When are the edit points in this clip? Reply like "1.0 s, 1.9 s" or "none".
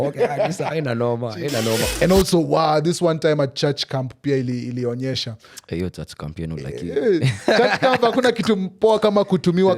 1.9 s